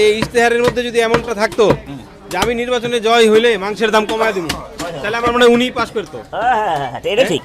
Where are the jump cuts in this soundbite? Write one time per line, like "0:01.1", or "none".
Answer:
none